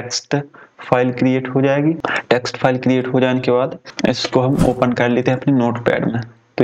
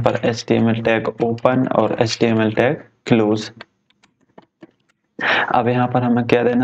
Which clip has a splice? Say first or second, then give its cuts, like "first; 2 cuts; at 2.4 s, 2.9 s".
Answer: first; 2 cuts; at 2.0 s, 3.8 s